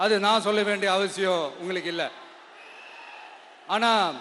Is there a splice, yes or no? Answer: no